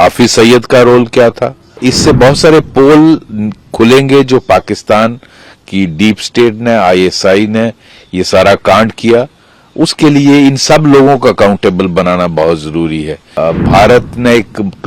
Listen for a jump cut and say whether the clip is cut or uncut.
cut